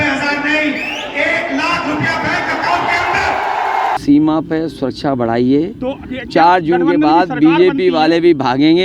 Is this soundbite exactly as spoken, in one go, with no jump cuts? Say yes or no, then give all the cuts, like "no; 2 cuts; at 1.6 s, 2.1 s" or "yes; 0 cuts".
no; 1 cut; at 4.0 s